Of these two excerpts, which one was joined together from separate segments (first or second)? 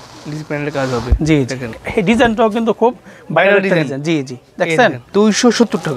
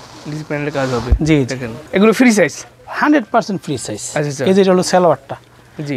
first